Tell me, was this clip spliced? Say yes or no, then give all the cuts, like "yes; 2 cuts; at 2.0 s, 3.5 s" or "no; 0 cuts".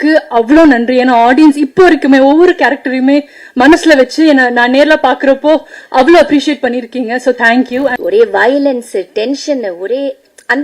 yes; 1 cut; at 8.0 s